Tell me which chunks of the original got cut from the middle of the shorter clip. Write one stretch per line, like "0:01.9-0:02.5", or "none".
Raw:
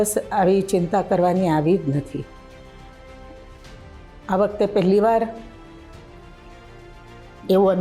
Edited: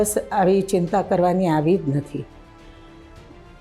0:02.7-0:05.5